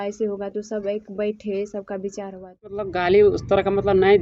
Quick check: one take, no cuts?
no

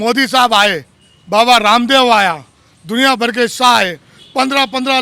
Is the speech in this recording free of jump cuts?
yes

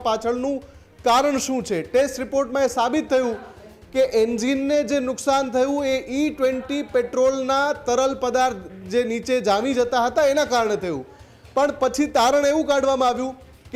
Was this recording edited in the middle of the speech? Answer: no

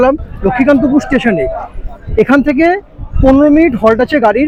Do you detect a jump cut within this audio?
no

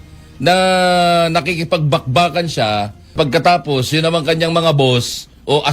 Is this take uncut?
no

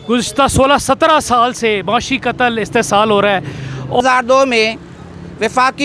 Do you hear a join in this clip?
yes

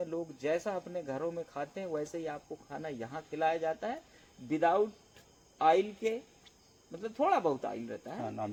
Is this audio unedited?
yes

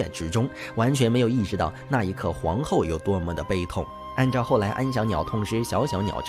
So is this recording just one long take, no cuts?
yes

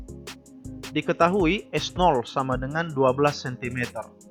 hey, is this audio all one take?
no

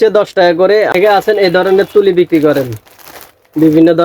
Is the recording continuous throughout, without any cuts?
no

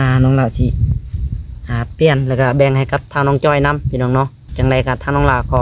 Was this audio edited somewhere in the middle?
yes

